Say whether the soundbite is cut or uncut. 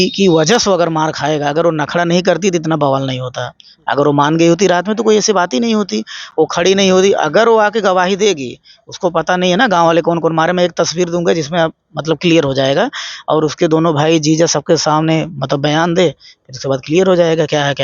uncut